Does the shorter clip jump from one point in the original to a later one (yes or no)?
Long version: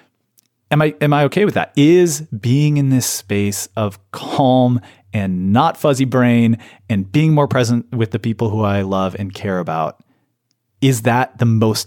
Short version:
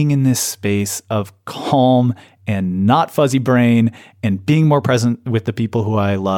no